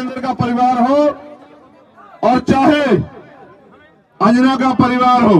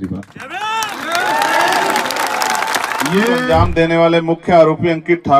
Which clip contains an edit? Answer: second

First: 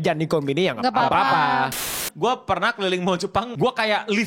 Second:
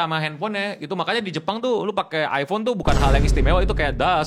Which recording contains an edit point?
first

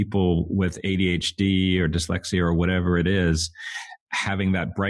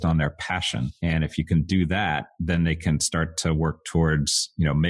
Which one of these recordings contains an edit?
second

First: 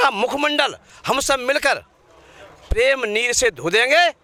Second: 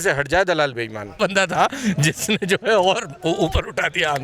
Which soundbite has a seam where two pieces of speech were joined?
second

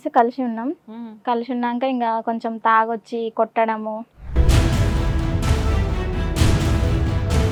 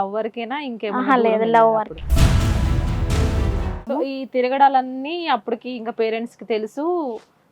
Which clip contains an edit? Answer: second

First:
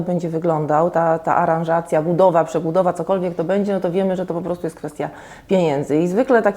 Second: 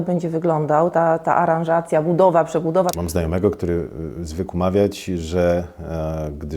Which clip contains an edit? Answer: second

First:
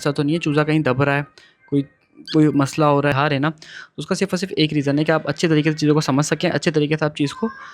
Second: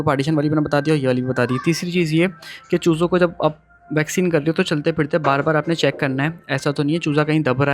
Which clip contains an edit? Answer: first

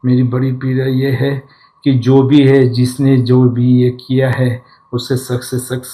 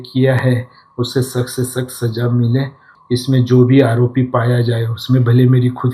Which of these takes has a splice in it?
second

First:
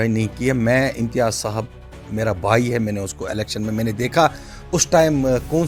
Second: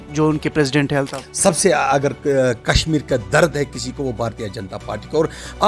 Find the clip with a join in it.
second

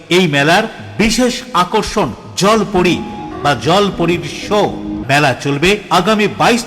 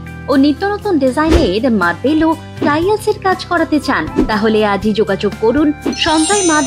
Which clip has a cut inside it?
first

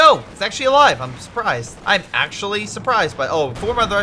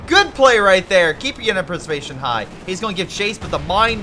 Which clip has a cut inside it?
first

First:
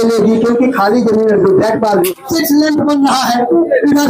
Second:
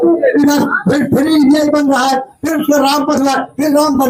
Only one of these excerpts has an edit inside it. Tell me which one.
first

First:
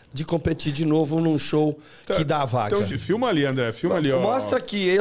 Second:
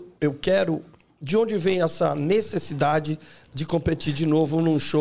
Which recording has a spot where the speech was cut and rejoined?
first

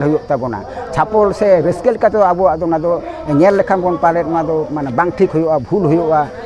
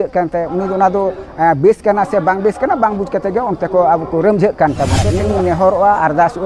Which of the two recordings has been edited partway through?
second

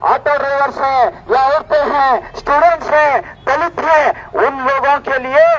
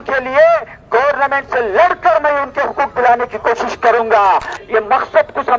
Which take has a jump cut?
second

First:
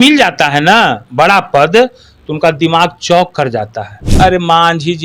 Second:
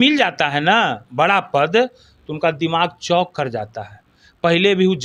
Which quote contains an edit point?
first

